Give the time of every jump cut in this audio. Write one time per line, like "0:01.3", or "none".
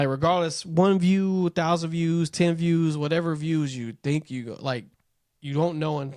none